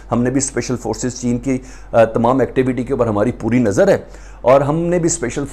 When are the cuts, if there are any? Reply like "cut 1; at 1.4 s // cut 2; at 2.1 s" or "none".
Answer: none

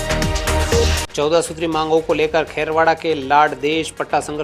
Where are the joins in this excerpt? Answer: cut 1; at 1.0 s

